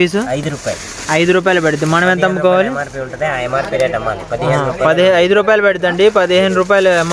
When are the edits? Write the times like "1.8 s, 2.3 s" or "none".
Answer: none